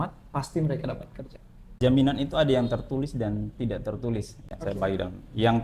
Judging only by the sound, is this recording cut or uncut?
cut